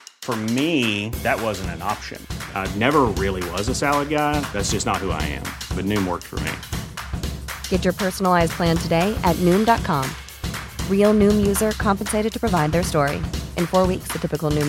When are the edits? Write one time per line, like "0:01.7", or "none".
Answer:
none